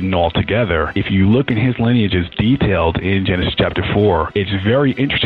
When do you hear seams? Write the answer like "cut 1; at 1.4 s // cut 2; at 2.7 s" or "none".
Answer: cut 1; at 0.9 s // cut 2; at 4.3 s